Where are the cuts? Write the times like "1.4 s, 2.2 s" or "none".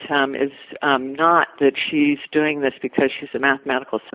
none